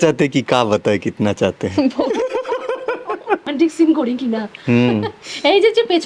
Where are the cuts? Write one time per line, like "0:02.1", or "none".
0:03.5